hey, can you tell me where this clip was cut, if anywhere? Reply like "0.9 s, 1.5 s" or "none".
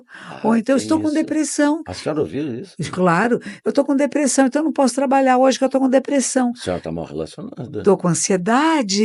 none